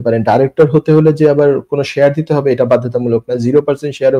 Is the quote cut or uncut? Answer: uncut